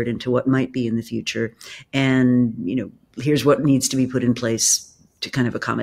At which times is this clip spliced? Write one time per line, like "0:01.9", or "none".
none